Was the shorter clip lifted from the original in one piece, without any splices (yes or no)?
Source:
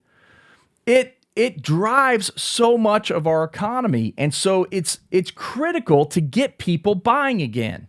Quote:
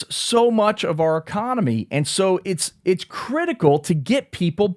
yes